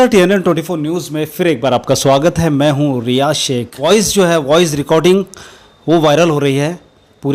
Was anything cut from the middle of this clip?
yes; 1 cut; at 3.7 s

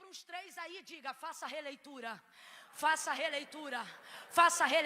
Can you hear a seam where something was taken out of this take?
no; 0 cuts

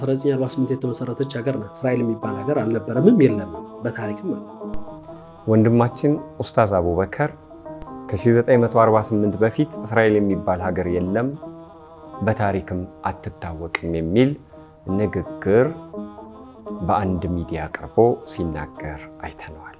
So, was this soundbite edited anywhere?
no; 0 cuts

